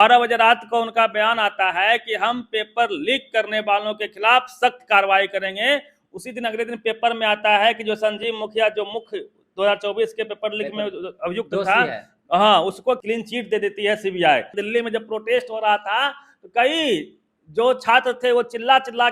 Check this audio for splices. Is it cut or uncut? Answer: cut